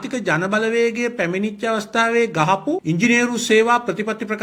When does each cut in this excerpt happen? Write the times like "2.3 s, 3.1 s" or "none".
none